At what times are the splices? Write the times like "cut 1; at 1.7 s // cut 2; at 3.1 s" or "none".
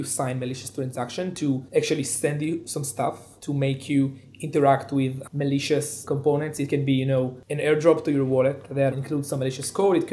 cut 1; at 1.6 s // cut 2; at 3.3 s // cut 3; at 6.0 s // cut 4; at 8.9 s